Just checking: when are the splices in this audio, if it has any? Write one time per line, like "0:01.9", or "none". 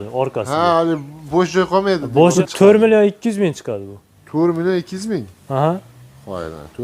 0:02.3